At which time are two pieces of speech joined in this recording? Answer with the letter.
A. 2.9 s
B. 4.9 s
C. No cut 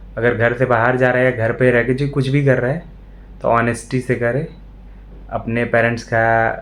C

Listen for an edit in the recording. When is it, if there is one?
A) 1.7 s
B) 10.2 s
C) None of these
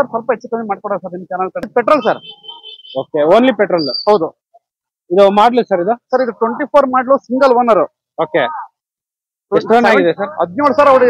A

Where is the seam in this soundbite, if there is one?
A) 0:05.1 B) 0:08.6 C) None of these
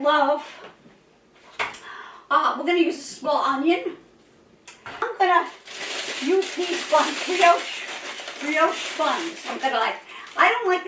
A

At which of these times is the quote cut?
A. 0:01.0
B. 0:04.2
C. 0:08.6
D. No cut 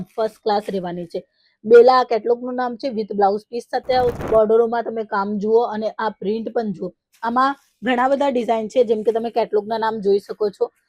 B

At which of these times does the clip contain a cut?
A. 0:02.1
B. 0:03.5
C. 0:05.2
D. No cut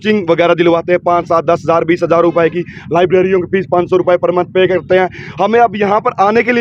D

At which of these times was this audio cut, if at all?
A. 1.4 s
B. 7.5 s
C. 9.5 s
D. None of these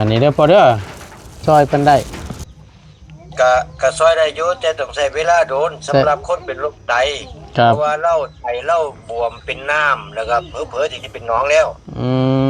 A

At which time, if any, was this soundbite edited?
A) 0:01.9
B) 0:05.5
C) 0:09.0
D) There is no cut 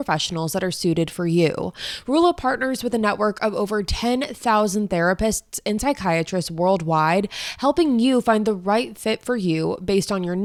D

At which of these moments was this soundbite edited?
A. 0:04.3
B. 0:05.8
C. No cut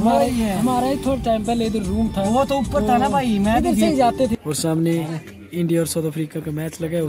A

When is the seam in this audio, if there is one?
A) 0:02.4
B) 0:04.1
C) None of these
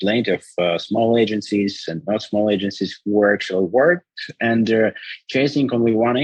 C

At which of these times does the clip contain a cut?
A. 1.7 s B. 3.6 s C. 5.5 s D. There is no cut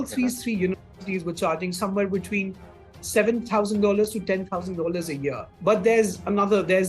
C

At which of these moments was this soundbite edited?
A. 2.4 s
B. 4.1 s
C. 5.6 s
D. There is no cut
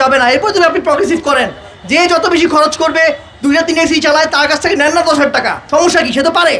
C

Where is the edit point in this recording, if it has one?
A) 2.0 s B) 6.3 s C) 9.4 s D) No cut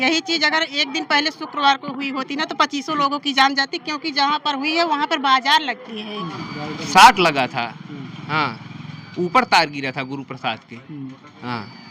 B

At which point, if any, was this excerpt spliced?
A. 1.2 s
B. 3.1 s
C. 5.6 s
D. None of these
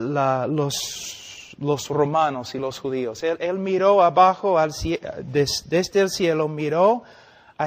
C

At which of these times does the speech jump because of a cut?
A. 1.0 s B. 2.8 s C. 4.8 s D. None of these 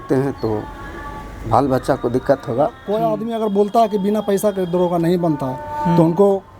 B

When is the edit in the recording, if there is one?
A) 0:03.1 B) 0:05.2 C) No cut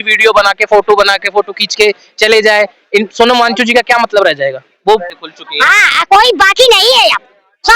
B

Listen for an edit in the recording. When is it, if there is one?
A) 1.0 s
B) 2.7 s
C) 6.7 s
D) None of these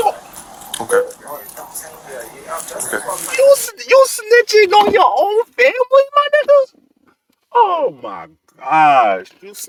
D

